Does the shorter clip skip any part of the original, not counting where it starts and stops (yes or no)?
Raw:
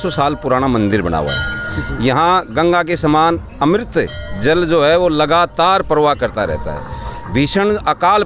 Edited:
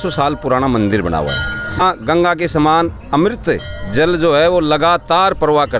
yes